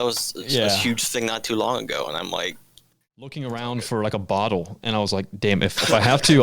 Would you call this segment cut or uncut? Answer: cut